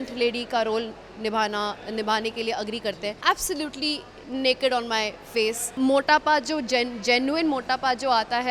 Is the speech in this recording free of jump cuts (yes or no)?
no